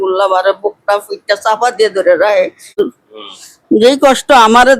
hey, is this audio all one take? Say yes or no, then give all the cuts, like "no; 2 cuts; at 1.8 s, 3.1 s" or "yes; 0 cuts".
no; 1 cut; at 2.7 s